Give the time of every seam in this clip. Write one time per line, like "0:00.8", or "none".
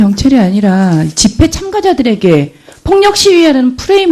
none